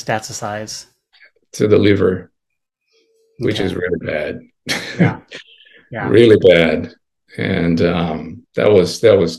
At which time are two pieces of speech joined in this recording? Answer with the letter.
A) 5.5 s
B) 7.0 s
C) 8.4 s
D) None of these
C